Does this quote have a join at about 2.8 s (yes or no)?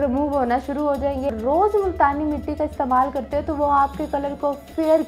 no